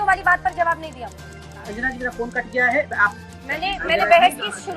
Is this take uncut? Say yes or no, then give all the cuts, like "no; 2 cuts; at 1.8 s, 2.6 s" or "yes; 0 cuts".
no; 2 cuts; at 1.6 s, 3.2 s